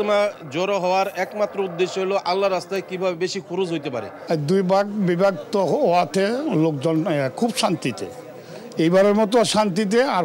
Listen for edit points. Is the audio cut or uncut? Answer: cut